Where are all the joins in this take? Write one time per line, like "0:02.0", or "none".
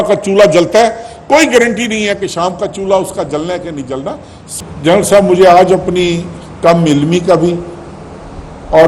0:04.5